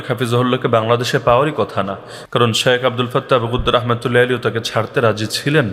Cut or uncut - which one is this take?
uncut